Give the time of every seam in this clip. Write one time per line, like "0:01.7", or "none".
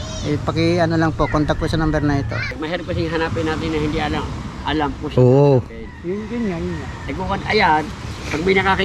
0:02.5